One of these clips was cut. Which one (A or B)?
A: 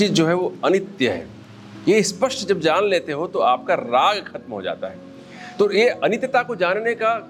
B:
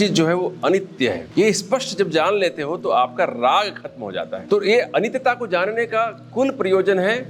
B